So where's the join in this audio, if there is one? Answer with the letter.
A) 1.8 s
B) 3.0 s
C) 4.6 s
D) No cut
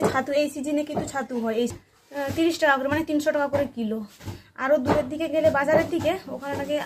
A